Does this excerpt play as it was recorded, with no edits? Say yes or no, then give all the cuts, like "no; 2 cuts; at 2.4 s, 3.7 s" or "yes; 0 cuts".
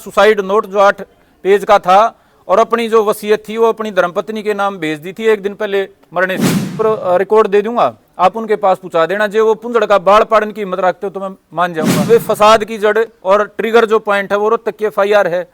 no; 2 cuts; at 6.8 s, 12.1 s